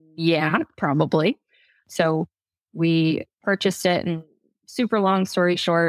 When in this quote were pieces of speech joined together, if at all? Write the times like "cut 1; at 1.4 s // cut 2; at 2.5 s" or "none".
cut 1; at 1.8 s